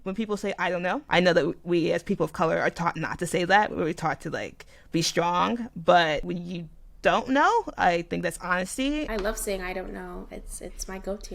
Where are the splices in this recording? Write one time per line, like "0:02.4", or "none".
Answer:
0:01.0
0:06.3
0:09.1

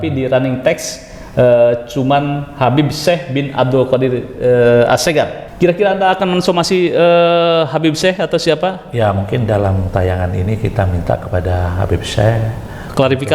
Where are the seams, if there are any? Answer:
0:05.4

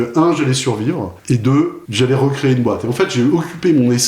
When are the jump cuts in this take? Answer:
0:01.1
0:01.8

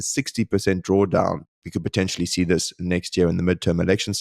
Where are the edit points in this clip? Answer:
none

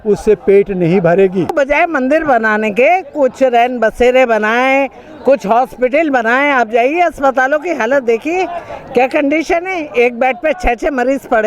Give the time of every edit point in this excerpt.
0:01.5

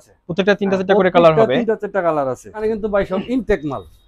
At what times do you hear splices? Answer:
0:02.6

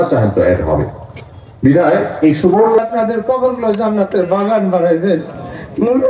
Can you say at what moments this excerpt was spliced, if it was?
0:02.8

